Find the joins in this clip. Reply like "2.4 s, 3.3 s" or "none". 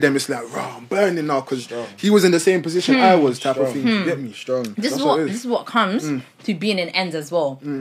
none